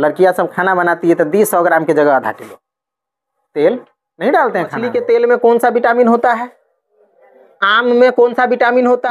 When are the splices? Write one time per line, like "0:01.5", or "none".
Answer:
0:04.9

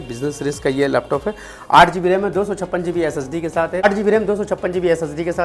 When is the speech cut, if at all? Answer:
0:03.9

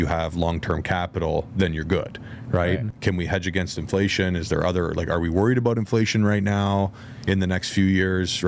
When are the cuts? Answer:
0:02.9

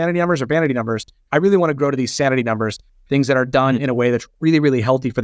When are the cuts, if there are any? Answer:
0:01.1

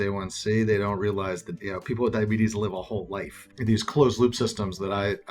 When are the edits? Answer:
0:01.5
0:03.5

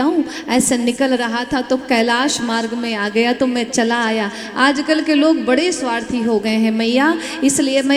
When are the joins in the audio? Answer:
none

